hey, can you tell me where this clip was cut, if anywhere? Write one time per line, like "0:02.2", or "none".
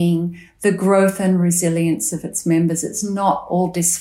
none